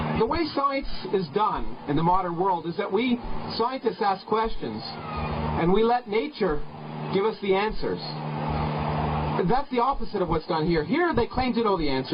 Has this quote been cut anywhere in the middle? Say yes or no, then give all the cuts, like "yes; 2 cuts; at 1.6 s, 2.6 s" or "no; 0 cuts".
yes; 1 cut; at 7.6 s